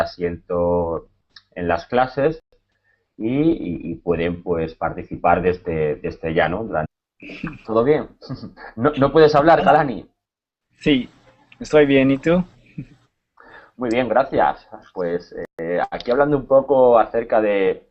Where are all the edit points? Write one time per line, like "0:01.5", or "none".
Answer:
none